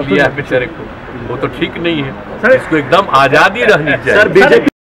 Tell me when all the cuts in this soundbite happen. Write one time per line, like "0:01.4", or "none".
none